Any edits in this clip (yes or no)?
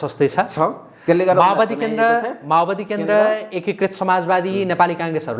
no